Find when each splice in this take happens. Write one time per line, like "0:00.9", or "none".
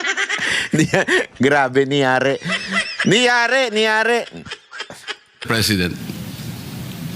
0:05.5